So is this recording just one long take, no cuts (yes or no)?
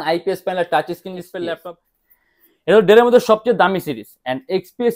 no